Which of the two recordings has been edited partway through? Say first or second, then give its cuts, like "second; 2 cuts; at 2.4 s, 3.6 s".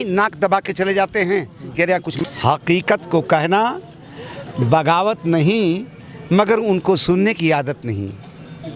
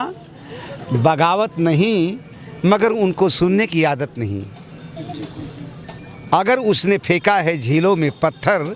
first; 1 cut; at 2.1 s